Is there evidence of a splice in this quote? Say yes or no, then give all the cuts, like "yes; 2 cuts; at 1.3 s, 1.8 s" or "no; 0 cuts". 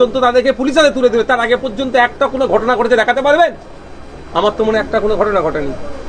no; 0 cuts